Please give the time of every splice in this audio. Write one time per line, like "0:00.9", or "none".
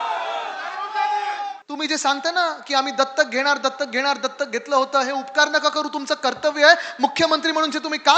0:01.6